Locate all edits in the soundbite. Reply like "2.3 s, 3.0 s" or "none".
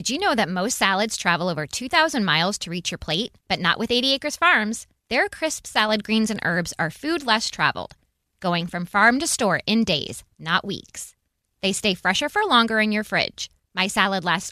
none